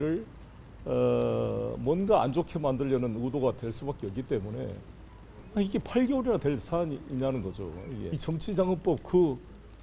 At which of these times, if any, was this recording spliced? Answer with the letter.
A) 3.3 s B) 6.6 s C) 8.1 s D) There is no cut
C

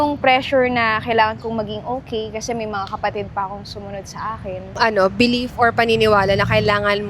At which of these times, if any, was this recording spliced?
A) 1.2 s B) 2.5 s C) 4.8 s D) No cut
C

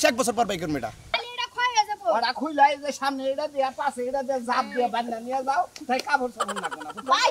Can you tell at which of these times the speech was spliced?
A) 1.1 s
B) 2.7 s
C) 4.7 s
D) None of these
A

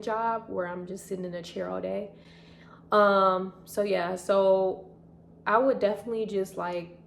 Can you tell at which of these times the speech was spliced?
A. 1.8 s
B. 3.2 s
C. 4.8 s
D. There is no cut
D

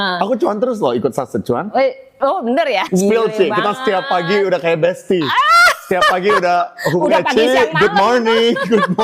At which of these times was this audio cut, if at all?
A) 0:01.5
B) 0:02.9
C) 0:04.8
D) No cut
B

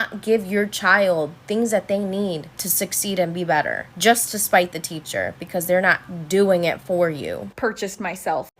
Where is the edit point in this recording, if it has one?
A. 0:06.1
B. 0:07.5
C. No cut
B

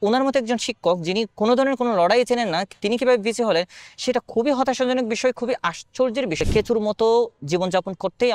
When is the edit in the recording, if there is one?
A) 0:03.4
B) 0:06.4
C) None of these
B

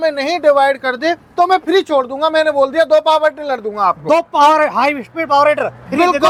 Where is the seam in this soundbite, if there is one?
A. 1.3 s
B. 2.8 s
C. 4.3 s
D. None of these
D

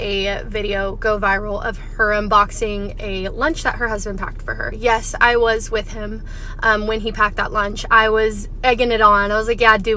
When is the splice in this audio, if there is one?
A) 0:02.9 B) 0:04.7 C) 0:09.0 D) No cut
B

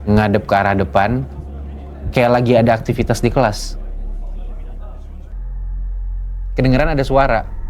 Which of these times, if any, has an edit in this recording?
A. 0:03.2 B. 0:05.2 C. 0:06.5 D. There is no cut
B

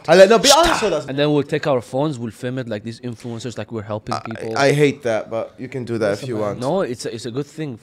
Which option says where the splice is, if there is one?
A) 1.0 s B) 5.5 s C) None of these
A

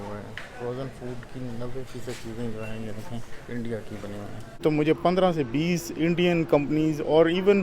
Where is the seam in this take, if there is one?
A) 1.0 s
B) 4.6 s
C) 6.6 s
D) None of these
B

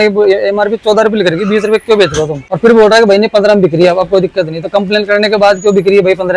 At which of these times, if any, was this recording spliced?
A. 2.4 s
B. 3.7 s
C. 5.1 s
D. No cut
A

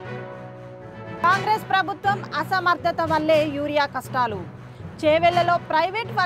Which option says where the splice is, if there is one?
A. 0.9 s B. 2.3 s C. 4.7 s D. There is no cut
A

